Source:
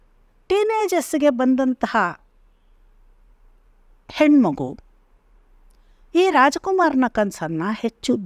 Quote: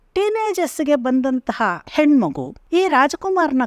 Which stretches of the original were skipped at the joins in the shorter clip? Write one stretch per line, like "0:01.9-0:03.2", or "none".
0:02.2-0:04.1
0:04.7-0:05.9